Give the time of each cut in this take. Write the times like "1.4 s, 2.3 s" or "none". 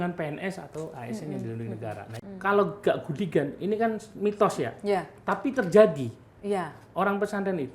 2.1 s